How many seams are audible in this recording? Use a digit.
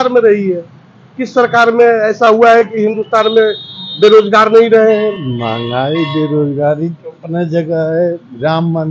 1